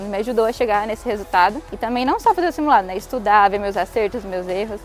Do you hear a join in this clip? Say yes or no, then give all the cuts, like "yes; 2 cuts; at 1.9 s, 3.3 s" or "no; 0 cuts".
no; 0 cuts